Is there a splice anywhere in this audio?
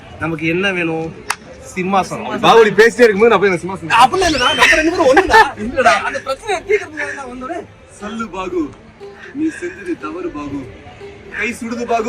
yes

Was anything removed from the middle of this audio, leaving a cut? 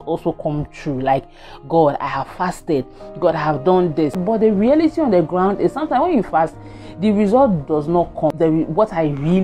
yes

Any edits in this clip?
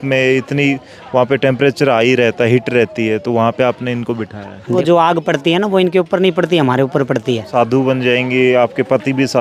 yes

